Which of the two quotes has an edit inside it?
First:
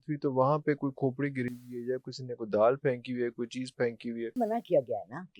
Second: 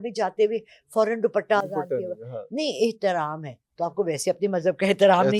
first; 1 cut; at 4.4 s

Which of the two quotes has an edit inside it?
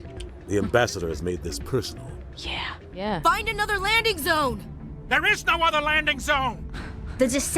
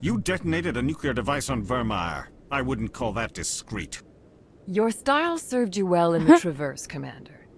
first; 1 cut; at 3.0 s

